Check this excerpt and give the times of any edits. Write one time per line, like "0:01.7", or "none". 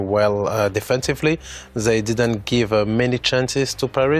none